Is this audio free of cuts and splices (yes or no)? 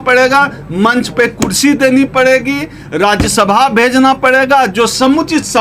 yes